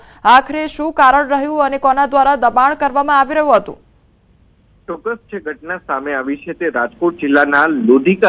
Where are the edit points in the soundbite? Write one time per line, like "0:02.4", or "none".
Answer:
0:01.5